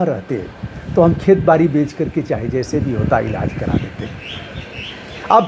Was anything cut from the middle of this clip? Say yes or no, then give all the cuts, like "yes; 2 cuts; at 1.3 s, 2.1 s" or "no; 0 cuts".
no; 0 cuts